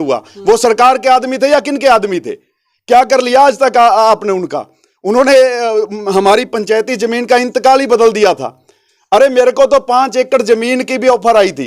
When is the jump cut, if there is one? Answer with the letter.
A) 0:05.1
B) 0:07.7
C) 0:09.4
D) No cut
D